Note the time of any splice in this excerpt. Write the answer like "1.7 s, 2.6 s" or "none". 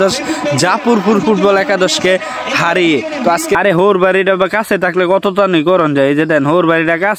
3.6 s